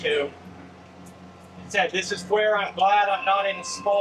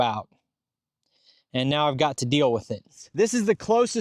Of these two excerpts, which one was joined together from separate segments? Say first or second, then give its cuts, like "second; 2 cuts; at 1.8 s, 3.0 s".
second; 1 cut; at 3.0 s